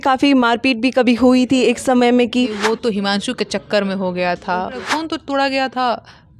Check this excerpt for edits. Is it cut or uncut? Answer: cut